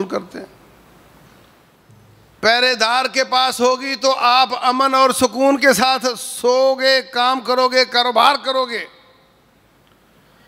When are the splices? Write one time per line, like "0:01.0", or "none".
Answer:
0:01.6